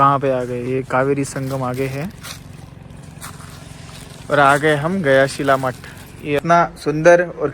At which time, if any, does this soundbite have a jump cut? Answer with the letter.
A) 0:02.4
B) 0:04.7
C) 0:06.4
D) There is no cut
C